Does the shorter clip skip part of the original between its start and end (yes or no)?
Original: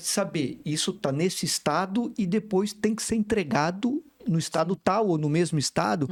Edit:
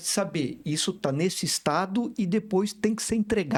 no